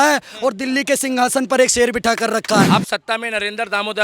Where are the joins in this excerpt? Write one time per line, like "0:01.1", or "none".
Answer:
0:02.7